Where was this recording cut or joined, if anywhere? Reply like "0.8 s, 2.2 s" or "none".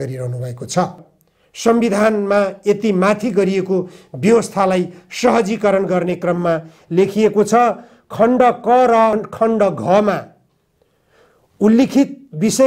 1.1 s